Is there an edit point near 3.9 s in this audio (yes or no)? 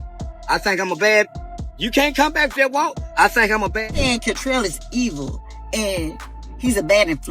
yes